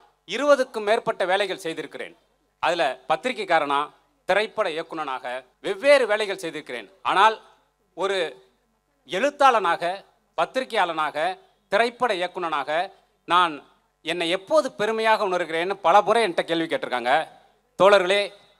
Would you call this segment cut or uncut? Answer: cut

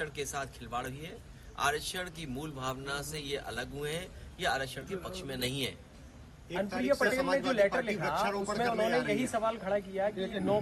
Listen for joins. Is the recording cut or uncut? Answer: uncut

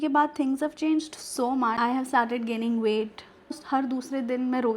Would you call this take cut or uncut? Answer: cut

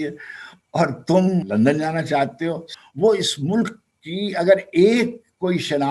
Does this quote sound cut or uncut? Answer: cut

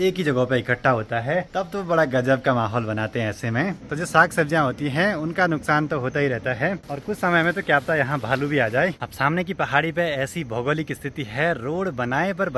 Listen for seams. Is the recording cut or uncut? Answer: cut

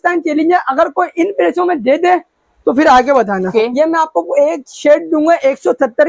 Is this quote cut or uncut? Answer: cut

